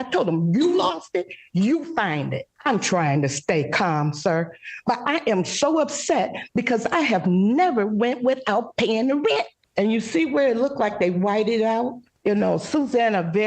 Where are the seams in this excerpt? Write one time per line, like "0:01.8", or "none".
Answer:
0:02.5
0:09.6
0:12.0